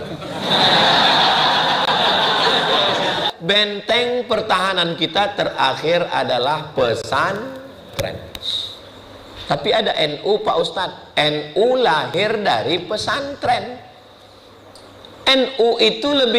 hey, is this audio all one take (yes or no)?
no